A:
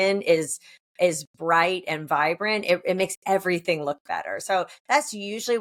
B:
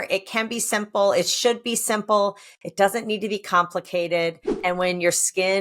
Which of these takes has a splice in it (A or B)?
B